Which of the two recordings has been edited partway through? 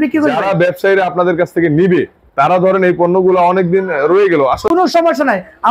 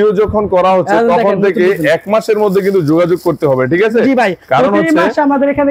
first; 1 cut; at 4.7 s

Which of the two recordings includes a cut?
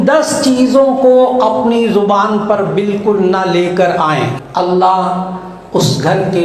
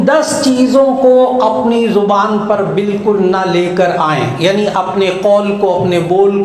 first; 1 cut; at 4.3 s

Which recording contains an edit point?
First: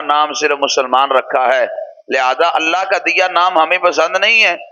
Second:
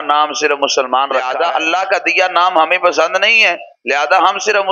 second; 1 cut; at 1.3 s

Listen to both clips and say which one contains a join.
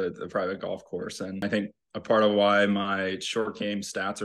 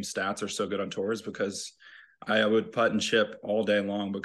first; 1 cut; at 1.5 s

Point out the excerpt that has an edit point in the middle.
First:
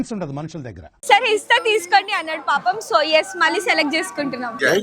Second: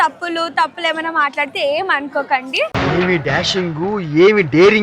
first; 1 cut; at 0.9 s

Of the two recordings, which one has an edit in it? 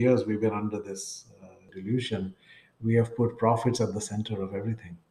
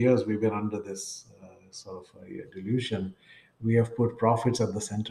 first; 1 cut; at 1.7 s

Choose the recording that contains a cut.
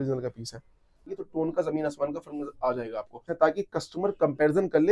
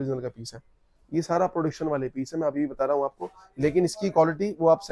first; 2 cuts; at 1.1 s, 3.2 s

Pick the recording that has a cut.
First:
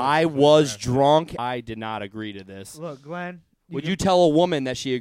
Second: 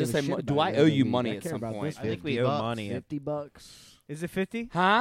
first; 1 cut; at 1.4 s

